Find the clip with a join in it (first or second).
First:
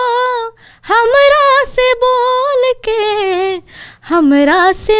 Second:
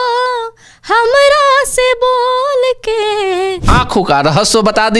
second